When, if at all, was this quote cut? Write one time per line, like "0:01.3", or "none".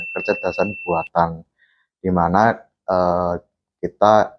none